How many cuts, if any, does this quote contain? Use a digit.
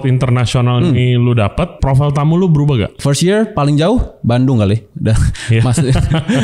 2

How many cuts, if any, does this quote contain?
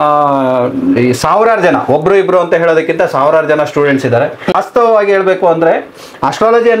1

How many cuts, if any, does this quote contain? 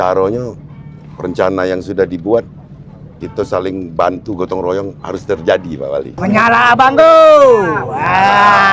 1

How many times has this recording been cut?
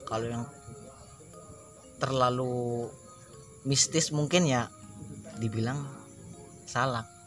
0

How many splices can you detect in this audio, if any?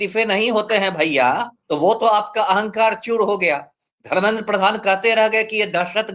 1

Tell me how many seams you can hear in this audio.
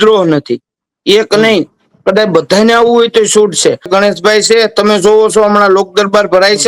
1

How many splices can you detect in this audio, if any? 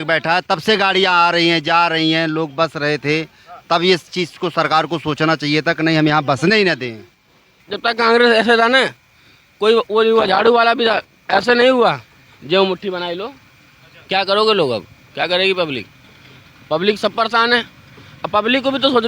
1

